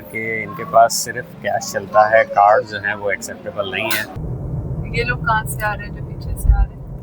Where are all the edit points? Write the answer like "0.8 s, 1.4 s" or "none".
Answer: 4.2 s